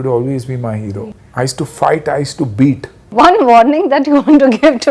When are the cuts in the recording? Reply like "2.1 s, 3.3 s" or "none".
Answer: 1.1 s, 2.9 s